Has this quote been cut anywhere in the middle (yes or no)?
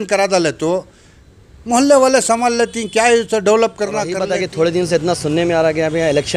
yes